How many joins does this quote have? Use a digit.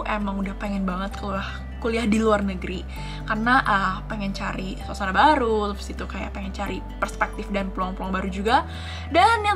0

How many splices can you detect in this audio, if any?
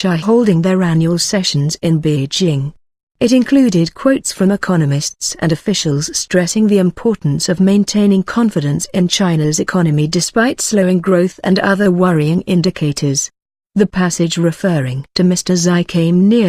0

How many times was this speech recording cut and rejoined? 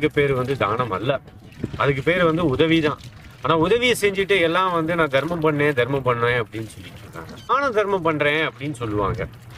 1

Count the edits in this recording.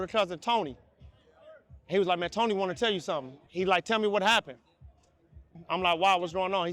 2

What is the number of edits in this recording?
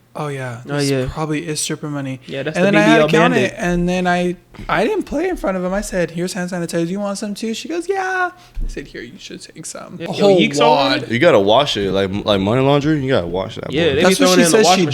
1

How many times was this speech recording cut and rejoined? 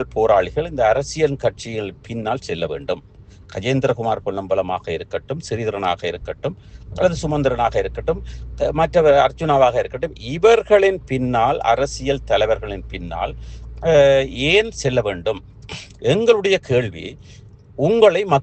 0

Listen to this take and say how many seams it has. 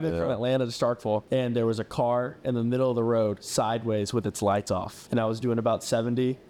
2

